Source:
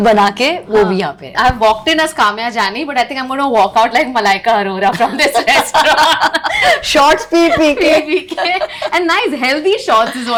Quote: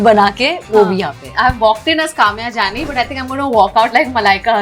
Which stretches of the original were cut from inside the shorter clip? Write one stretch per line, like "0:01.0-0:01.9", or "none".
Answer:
none